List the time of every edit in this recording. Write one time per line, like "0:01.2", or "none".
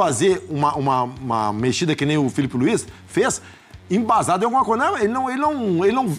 none